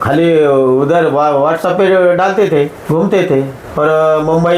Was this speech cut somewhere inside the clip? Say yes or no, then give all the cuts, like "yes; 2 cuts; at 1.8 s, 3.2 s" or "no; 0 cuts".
yes; 2 cuts; at 2.8 s, 3.6 s